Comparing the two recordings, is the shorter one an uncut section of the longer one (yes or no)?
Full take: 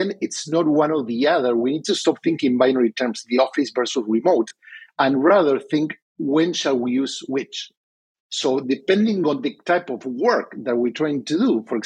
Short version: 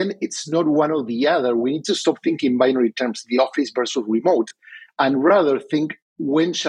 yes